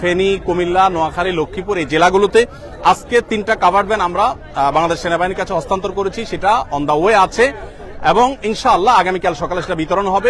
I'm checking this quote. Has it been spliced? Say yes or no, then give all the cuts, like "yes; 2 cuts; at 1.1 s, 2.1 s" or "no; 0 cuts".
no; 0 cuts